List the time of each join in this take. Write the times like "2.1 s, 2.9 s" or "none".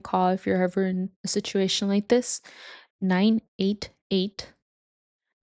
2.9 s

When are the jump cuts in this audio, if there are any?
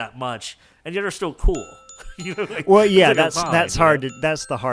none

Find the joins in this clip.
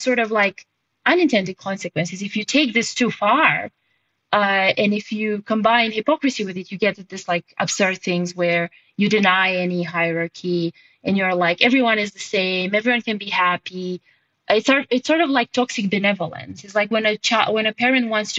none

